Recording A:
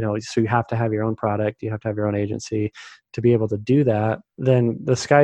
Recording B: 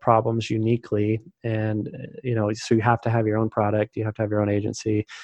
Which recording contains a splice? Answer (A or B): A